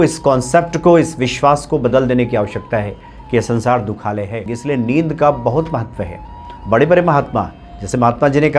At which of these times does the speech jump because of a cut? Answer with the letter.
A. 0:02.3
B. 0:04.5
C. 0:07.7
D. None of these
B